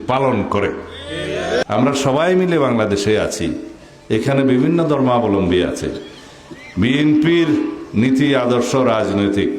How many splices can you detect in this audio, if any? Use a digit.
1